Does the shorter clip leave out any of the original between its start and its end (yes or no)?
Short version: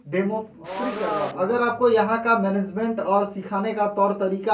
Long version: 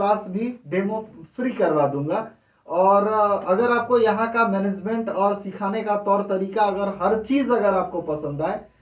yes